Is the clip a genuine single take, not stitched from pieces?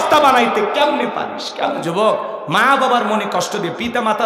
no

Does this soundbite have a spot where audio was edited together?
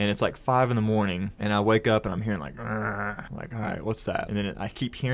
yes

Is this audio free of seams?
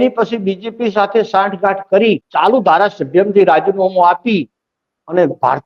no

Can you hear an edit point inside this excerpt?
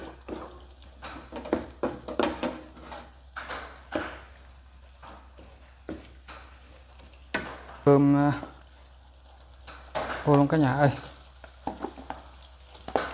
yes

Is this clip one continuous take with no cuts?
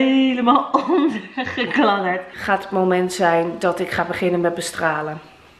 no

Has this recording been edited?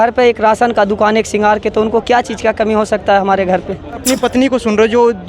yes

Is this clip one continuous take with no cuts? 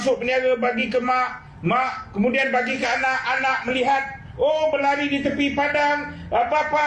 yes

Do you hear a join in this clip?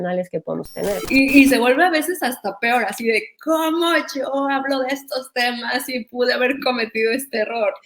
yes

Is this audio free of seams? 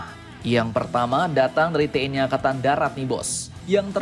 yes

